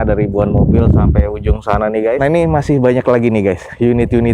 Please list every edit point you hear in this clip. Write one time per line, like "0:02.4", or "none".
0:02.2